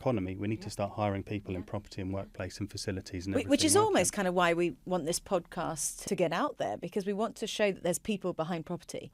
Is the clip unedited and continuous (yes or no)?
yes